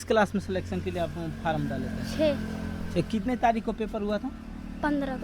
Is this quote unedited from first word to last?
yes; 0 cuts

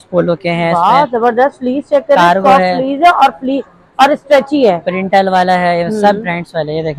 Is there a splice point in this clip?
no; 0 cuts

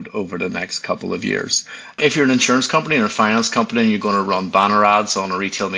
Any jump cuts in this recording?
yes; 1 cut; at 2.0 s

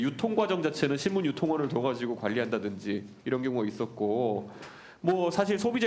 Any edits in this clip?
no; 0 cuts

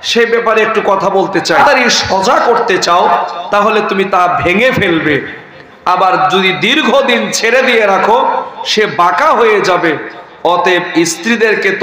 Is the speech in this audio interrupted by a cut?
yes; 1 cut; at 1.6 s

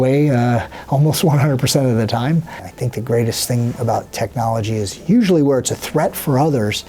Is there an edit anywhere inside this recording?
yes; 1 cut; at 2.5 s

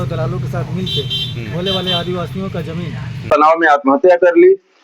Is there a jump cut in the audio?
yes; 1 cut; at 3.3 s

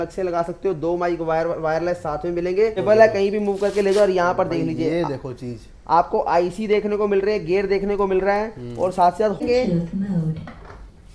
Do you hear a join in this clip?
yes; 2 cuts; at 2.8 s, 9.4 s

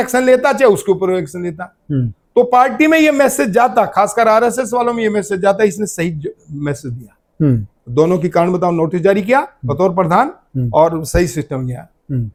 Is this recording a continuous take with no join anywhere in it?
yes; 0 cuts

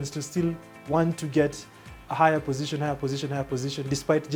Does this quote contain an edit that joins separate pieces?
no; 0 cuts

